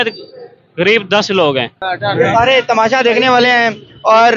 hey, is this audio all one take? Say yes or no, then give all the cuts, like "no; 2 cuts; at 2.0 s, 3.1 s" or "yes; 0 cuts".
no; 1 cut; at 1.7 s